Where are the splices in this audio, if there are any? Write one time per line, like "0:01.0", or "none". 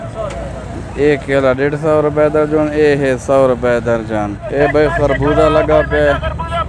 0:04.4